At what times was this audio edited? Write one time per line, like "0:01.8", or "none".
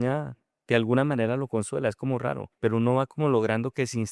0:02.5

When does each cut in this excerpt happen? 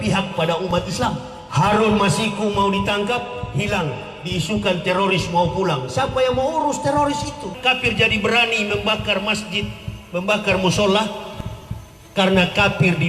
0:01.3
0:07.6

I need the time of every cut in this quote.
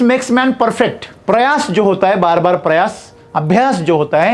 0:01.1

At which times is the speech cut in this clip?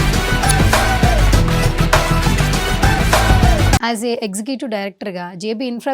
0:03.8

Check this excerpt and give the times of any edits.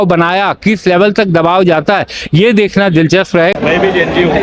0:03.5

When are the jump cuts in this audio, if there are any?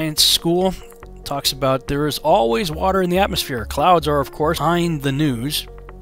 none

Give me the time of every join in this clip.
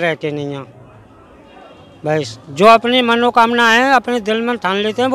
none

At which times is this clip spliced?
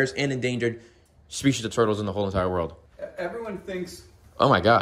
none

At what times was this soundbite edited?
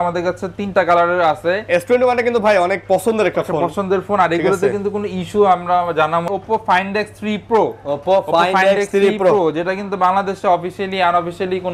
0:06.3

